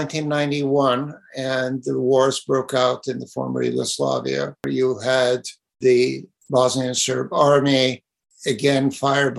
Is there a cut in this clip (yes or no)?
yes